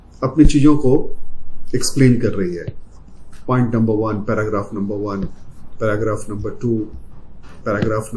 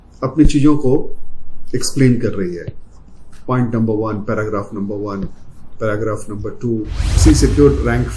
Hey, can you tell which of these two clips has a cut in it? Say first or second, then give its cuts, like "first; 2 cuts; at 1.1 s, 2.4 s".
second; 1 cut; at 7.0 s